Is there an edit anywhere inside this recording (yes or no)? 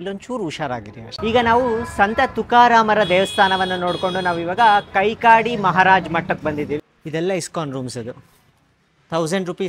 yes